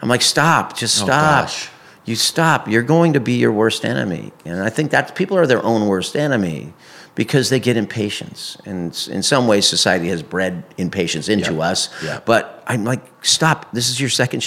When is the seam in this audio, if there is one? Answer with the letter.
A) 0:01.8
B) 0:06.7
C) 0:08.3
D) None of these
D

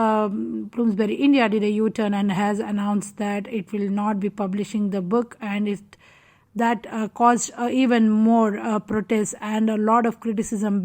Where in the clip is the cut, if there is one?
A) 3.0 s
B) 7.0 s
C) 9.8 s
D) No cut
D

